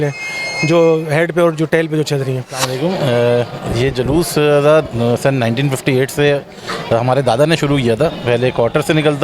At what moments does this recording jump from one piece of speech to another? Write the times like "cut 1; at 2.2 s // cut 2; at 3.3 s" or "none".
cut 1; at 2.7 s